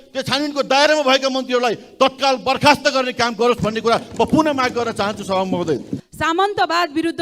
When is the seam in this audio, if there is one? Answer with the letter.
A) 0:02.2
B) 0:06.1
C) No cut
B